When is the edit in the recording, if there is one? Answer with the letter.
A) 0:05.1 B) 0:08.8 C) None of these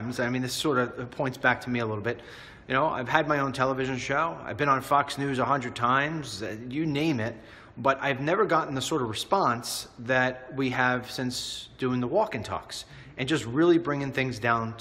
A